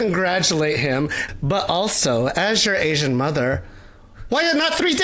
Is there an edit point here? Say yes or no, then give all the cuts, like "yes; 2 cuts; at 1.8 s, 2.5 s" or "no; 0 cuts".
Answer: yes; 1 cut; at 1.2 s